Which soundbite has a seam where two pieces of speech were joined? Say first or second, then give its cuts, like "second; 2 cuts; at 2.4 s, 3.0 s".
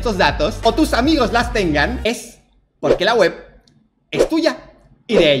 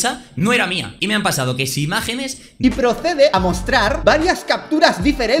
second; 2 cuts; at 0.9 s, 2.5 s